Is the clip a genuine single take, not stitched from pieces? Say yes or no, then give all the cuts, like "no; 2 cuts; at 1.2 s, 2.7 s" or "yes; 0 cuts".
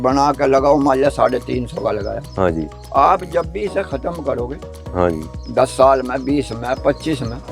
yes; 0 cuts